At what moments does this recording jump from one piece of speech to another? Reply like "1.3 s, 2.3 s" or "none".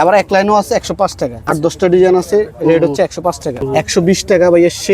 1.8 s, 3.7 s